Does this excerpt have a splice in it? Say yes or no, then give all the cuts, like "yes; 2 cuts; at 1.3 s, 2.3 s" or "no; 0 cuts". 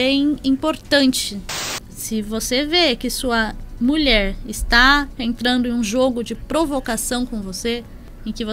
yes; 1 cut; at 1.7 s